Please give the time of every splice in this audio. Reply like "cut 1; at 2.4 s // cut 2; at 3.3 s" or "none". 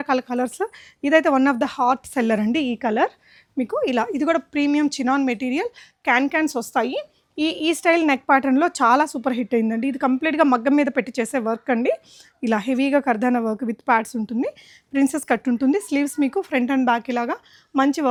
none